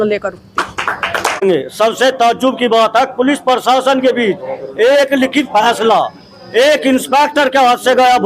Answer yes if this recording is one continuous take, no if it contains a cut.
no